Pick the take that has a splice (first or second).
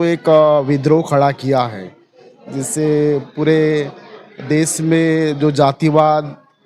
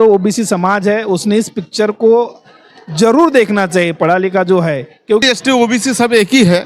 second